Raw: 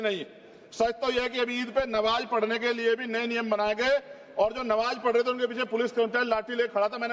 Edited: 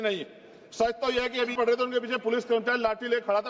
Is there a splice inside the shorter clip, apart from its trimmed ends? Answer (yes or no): yes